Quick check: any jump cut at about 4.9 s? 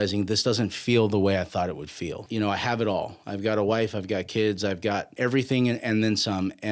no; 1 cut; at 2.2 s

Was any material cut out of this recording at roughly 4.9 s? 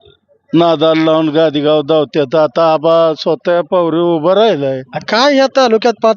yes; 1 cut; at 4.9 s

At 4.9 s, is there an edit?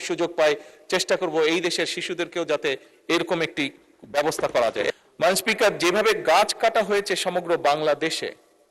yes; 1 cut; at 4.9 s

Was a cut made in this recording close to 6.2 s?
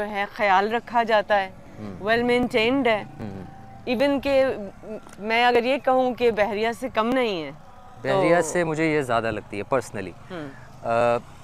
no; 0 cuts

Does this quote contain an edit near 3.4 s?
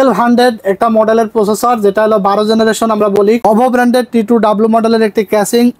yes; 1 cut; at 3.4 s

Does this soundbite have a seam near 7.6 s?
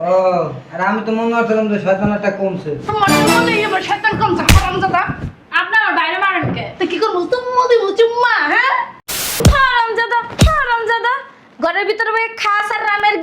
no; 1 cut; at 9.4 s

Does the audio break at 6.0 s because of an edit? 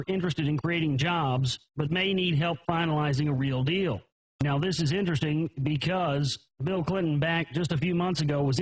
yes; 1 cut; at 6.0 s

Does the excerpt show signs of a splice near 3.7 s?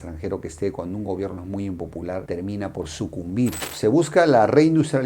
yes; 1 cut; at 3.7 s

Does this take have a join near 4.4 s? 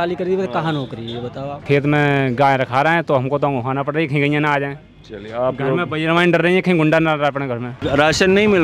no; 2 cuts; at 1.6 s, 7.7 s

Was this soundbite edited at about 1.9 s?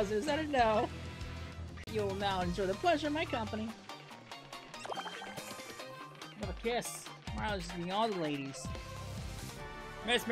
yes; 1 cut; at 1.9 s

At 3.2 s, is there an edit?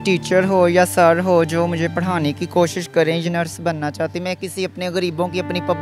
yes; 1 cut; at 3.2 s

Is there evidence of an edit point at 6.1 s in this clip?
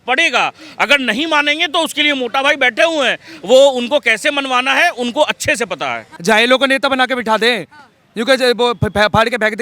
yes; 1 cut; at 6.1 s

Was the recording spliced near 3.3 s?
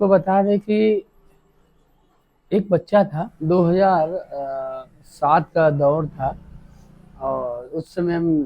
yes; 1 cut; at 3.3 s

